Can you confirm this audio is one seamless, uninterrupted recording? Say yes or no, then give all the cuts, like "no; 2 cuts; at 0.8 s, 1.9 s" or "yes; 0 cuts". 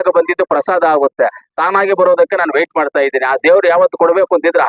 yes; 0 cuts